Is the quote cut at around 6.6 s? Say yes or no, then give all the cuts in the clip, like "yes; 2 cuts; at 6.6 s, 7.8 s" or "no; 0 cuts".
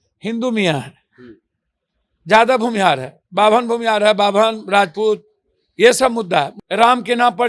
yes; 1 cut; at 6.6 s